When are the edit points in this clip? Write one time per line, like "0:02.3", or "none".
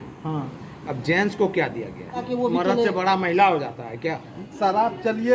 0:02.2
0:04.4